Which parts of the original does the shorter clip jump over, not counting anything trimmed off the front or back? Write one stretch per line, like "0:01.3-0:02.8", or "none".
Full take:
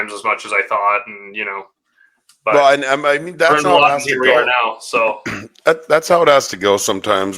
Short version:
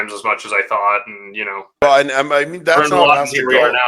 0:01.8-0:02.6